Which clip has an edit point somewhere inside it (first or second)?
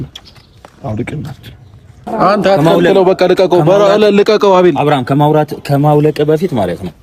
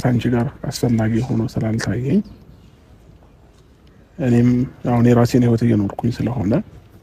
first